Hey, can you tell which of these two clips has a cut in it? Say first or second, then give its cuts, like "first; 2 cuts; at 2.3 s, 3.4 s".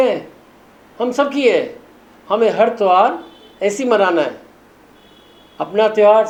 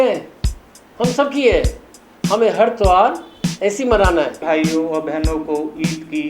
second; 1 cut; at 4.4 s